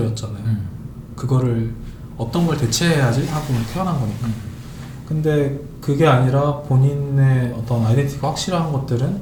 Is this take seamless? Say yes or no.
yes